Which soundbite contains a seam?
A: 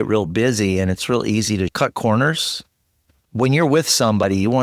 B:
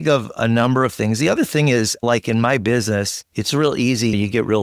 A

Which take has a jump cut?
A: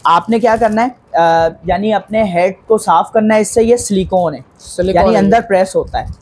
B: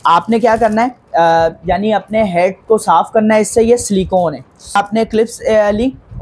B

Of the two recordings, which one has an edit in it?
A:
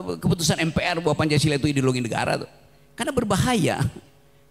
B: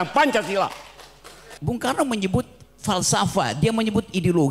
B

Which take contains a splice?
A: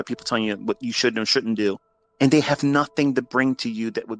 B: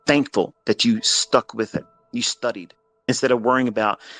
B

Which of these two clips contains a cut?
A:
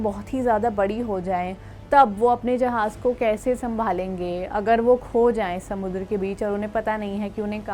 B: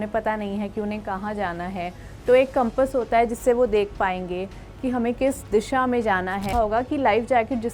B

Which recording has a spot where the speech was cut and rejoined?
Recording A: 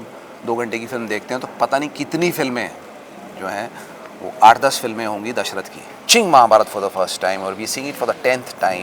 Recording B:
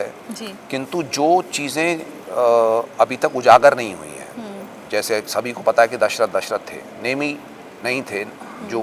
A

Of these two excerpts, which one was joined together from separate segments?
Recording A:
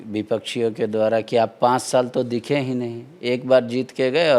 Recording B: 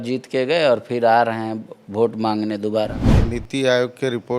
B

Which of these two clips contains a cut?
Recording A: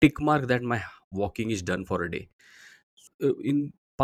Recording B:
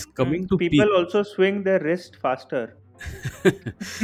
A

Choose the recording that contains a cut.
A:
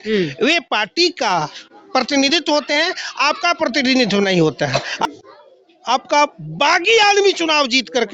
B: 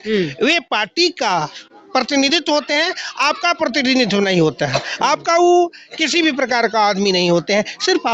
A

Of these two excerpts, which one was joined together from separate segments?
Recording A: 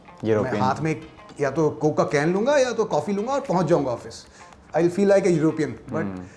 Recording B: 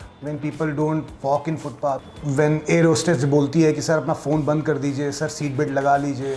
B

